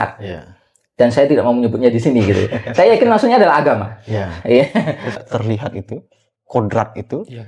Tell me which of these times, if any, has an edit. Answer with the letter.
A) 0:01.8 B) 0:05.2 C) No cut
B